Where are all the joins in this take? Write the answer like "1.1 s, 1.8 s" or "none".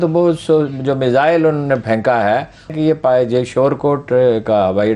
2.7 s